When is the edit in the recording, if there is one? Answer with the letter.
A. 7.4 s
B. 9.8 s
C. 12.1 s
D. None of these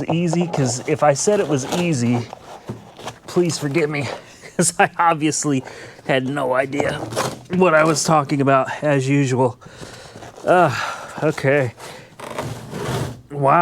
D